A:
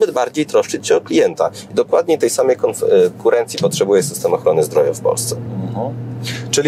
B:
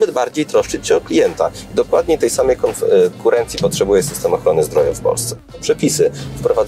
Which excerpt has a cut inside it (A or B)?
B